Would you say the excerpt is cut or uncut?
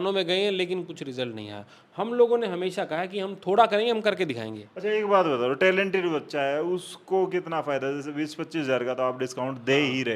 uncut